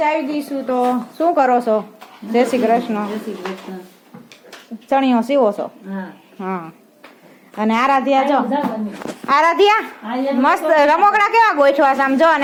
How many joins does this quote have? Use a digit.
0